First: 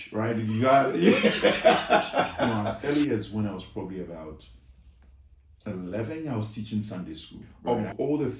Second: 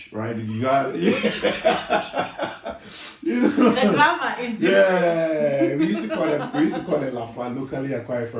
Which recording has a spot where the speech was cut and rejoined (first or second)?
first